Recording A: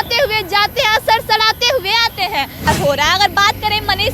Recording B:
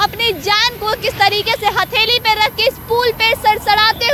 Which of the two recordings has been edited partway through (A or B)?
A